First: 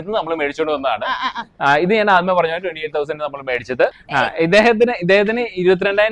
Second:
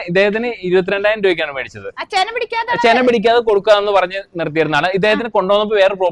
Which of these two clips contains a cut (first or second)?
first